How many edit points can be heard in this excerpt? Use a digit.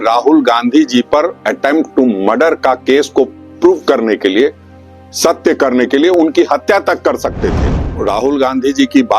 1